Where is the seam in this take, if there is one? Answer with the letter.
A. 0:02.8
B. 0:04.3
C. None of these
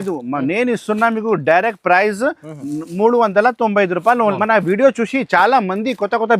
B